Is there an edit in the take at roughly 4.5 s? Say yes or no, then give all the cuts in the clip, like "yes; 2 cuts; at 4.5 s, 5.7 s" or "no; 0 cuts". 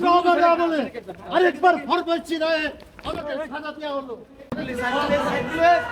yes; 1 cut; at 4.5 s